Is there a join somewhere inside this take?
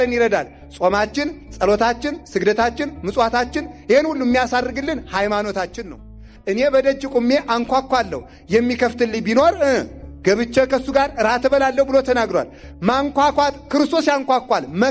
yes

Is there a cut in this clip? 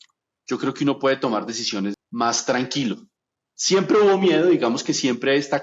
yes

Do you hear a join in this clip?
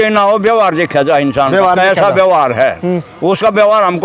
no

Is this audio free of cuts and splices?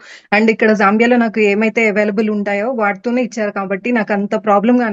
yes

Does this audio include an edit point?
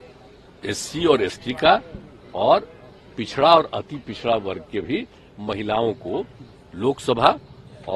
no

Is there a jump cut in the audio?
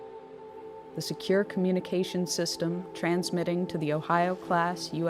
yes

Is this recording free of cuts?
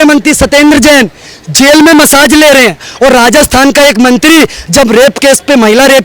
no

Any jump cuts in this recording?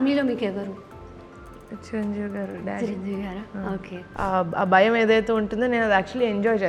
yes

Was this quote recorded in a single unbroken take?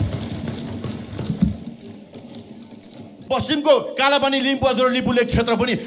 no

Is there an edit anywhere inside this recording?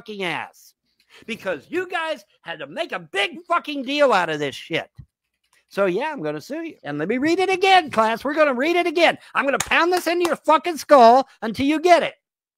yes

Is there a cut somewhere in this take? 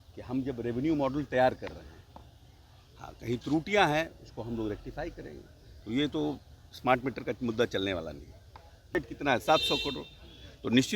yes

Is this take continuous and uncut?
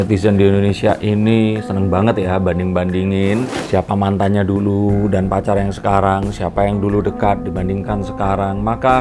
yes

